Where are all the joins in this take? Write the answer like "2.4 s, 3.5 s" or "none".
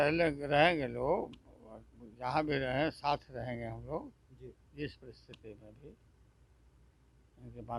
none